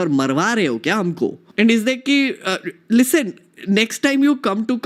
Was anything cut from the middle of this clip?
yes; 1 cut; at 1.4 s

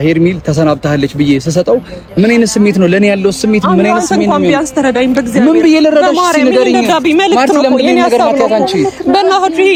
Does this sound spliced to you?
no; 0 cuts

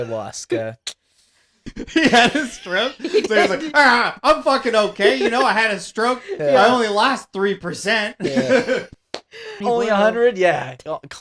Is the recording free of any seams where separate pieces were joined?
no; 1 cut; at 9.6 s

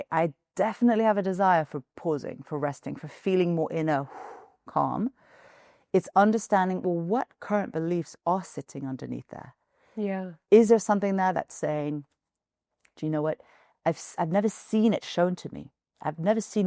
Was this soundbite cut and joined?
no; 0 cuts

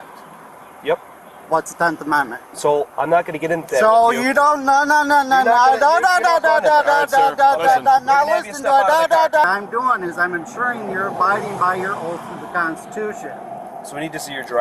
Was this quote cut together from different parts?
yes; 1 cut; at 9.4 s

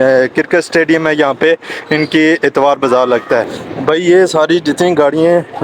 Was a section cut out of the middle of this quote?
yes; 1 cut; at 3.6 s

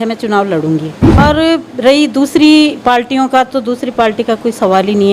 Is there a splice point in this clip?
yes; 1 cut; at 1.2 s

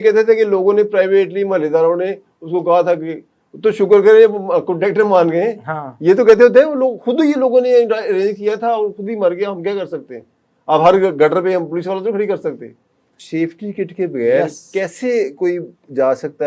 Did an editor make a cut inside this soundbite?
yes; 1 cut; at 13.2 s

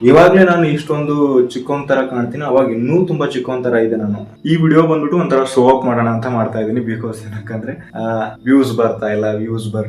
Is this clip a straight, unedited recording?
no; 1 cut; at 4.3 s

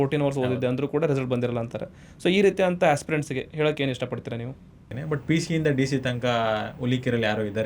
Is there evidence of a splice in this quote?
yes; 1 cut; at 4.9 s

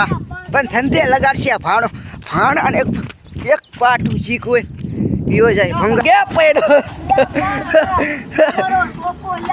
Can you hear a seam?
yes; 1 cut; at 6.0 s

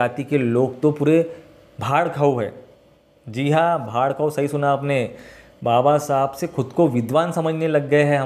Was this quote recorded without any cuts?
yes; 0 cuts

